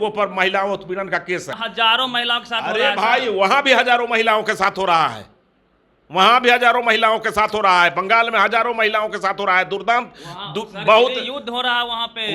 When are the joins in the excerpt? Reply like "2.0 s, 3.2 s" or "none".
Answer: 1.5 s